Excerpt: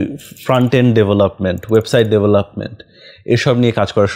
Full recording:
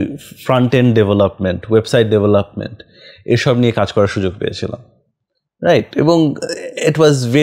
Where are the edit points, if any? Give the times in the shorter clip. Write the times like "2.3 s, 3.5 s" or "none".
none